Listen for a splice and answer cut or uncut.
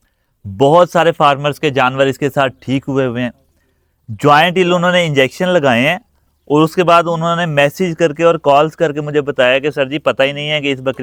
uncut